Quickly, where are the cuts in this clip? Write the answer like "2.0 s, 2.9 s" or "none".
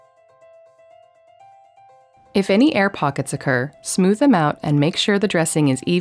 1.7 s